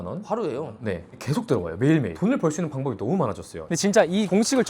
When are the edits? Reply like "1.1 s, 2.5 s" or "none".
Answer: 3.6 s

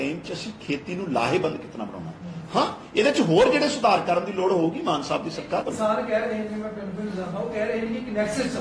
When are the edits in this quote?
5.7 s

